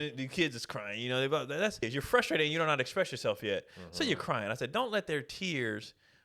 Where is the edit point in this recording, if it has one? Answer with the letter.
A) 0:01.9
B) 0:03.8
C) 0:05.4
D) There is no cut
A